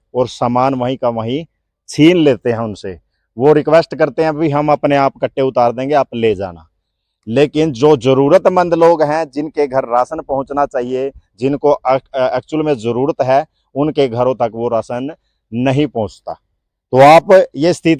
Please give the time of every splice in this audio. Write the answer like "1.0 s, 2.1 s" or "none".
none